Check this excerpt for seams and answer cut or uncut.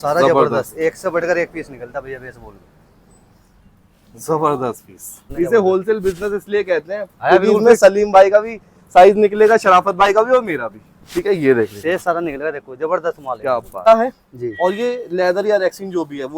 cut